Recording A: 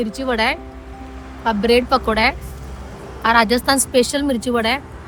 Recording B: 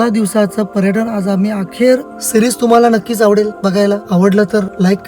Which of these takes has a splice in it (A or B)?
B